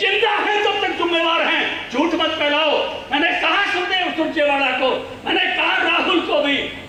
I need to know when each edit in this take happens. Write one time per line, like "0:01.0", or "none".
none